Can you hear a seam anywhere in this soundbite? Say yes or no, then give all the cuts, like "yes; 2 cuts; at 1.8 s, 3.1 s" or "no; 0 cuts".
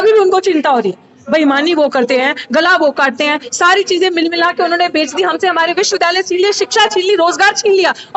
no; 0 cuts